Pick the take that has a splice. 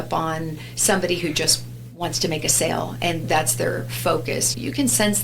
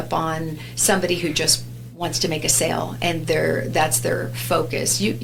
first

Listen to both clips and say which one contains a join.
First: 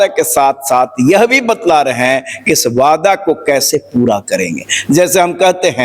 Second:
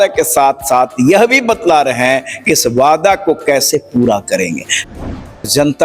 second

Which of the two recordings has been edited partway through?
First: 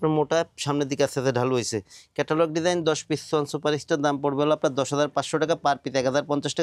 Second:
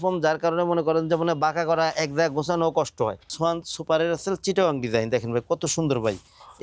second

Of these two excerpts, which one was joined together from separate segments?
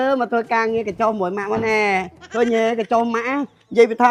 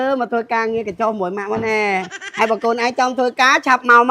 second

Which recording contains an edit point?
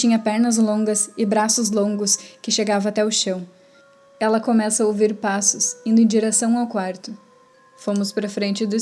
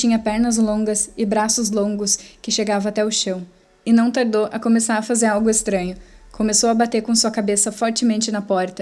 first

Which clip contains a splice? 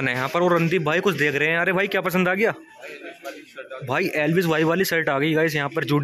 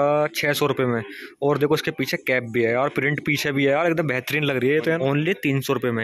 second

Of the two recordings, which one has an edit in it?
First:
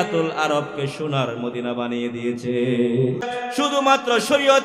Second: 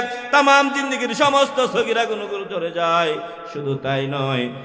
first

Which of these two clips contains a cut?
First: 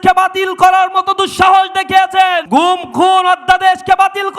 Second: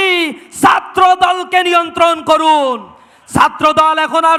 first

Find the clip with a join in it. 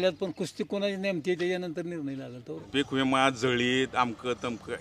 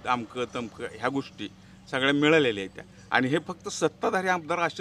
first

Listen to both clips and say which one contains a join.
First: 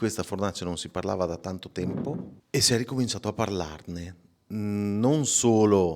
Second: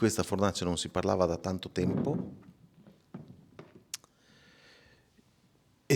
first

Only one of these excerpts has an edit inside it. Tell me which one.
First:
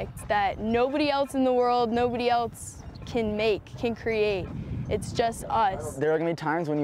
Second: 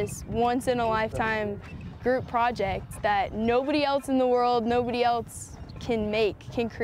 first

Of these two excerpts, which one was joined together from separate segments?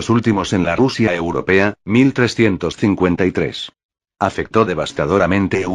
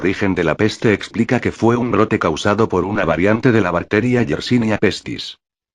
second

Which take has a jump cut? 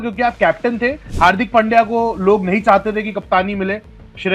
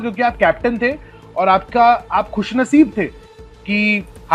first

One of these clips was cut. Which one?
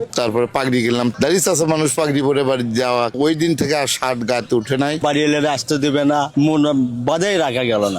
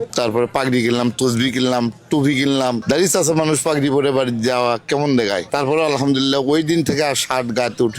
first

